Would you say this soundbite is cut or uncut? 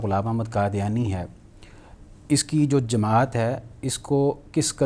uncut